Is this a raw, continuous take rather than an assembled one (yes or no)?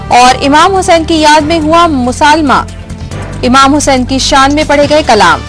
yes